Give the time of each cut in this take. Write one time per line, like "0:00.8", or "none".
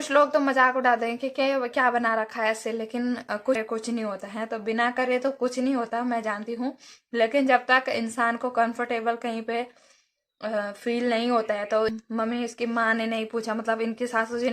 0:03.6
0:12.0